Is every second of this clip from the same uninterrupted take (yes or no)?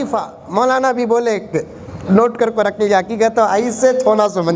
yes